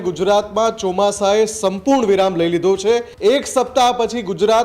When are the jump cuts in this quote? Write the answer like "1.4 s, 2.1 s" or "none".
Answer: 3.1 s

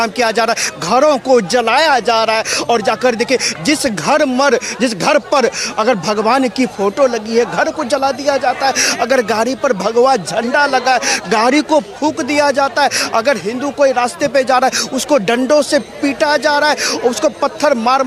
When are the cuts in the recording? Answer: none

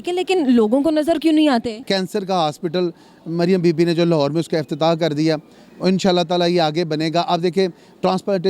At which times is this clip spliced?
1.8 s

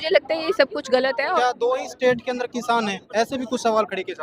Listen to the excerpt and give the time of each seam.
1.4 s

